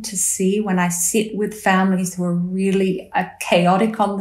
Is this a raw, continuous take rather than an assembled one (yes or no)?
yes